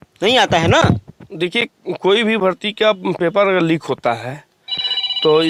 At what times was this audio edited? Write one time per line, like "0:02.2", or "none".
none